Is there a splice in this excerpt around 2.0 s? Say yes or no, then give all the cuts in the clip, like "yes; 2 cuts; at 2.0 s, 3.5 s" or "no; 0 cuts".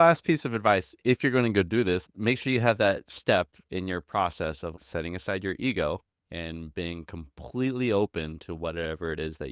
yes; 2 cuts; at 2.0 s, 4.7 s